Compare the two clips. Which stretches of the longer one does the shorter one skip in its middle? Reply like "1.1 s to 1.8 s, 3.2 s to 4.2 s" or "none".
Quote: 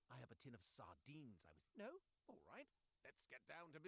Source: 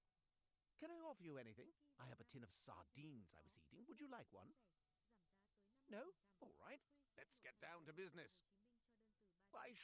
3.4 s to 5.7 s